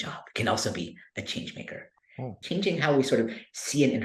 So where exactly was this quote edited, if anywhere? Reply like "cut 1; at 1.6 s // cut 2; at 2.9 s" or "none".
cut 1; at 2.4 s